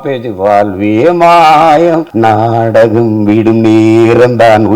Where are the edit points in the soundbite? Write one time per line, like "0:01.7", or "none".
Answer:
0:02.1

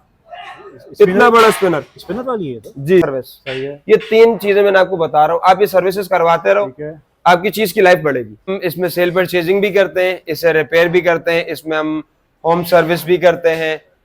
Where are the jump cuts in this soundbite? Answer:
0:03.1
0:08.5

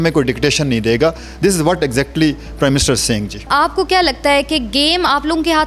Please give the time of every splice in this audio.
0:03.5

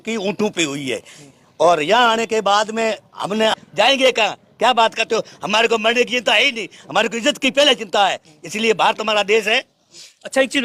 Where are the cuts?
0:03.6

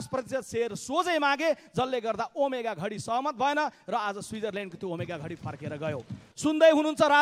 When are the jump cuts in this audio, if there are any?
0:06.2

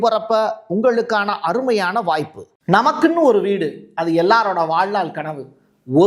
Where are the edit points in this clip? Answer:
0:02.5

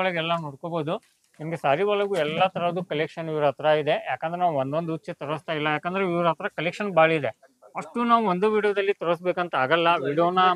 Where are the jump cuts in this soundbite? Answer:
none

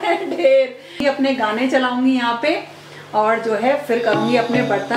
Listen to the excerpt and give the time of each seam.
0:01.0

